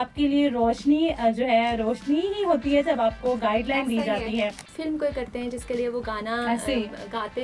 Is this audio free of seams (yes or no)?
no